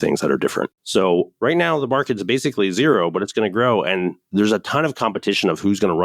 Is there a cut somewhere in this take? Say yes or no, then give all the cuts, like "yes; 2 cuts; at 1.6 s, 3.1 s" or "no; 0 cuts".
yes; 2 cuts; at 0.9 s, 4.2 s